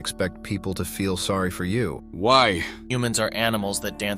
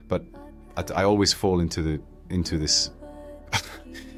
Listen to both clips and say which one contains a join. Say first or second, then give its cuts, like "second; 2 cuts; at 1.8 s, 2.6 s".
first; 2 cuts; at 2.0 s, 2.8 s